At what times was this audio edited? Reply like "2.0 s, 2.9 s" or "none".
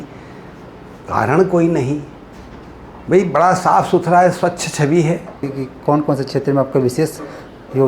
5.5 s